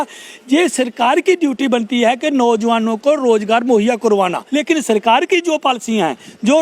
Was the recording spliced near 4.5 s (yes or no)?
yes